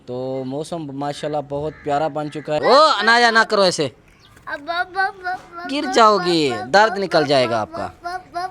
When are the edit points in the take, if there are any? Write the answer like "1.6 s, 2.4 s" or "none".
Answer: 2.6 s